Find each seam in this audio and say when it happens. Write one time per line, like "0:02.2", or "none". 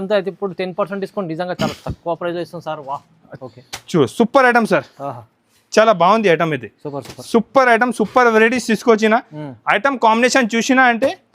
0:03.2